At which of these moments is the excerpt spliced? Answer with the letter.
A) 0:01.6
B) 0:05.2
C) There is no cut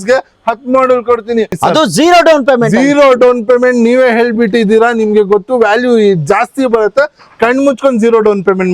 A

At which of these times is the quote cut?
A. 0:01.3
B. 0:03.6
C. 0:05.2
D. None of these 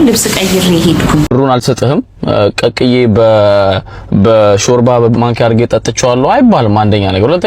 A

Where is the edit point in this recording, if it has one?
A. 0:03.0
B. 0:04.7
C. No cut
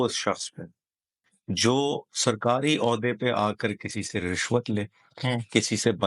C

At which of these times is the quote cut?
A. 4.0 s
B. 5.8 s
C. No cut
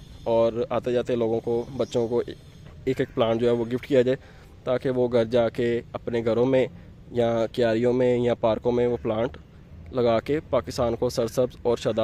C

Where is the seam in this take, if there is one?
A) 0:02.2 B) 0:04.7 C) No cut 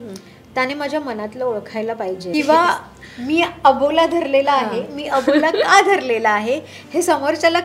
A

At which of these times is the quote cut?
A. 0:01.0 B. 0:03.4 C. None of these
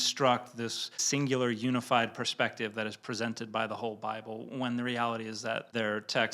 A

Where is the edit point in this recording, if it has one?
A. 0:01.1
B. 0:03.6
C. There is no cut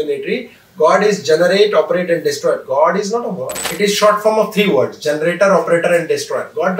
B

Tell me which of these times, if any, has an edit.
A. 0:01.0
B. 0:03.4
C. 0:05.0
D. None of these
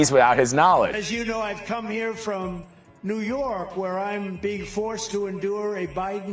A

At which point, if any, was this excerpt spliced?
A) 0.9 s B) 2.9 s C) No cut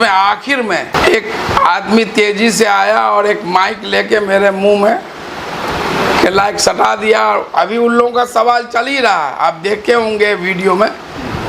A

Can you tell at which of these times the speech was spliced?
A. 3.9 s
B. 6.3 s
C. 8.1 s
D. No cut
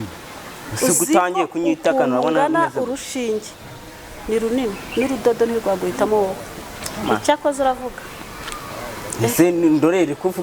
D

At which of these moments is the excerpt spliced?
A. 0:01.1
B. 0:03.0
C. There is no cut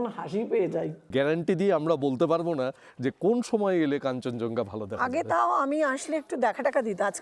A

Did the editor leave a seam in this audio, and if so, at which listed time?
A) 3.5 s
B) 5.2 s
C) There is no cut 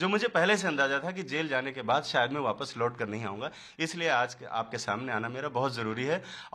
C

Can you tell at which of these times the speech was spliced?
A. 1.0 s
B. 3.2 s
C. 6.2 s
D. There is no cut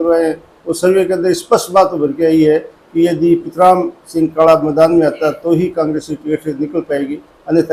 D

